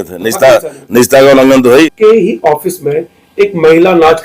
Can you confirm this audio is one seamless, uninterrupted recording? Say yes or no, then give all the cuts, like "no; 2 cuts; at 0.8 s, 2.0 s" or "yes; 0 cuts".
no; 1 cut; at 1.9 s